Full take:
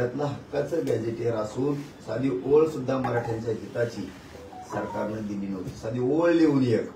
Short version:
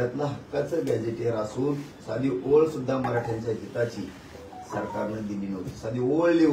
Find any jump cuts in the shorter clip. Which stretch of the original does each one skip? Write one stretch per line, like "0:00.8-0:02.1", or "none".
none

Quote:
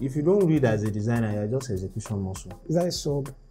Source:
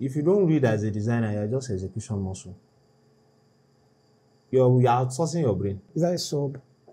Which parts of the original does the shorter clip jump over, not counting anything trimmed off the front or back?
0:02.6-0:05.8

